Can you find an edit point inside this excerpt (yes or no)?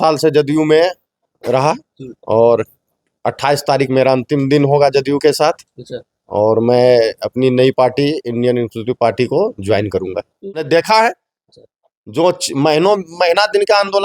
yes